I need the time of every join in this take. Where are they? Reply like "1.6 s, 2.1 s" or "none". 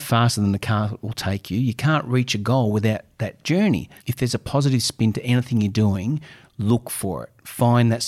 3.9 s